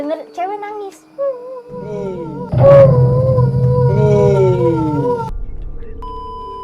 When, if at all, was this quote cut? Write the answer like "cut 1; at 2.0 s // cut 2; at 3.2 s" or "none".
cut 1; at 5.4 s